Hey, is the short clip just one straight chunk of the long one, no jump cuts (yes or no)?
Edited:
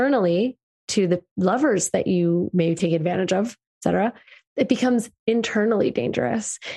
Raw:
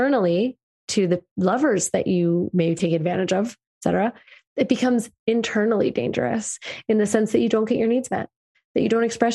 yes